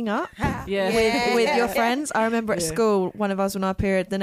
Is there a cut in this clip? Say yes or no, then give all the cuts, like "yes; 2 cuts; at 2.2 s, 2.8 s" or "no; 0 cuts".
no; 0 cuts